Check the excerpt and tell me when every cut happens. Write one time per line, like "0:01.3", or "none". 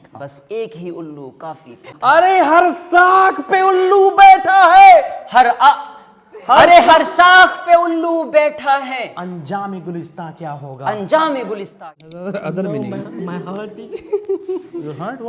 0:01.8
0:11.7